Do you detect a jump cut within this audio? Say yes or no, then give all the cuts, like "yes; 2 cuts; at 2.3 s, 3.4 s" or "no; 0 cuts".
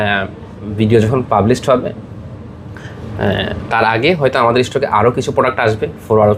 no; 0 cuts